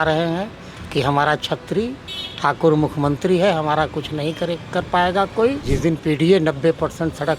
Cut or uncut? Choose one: cut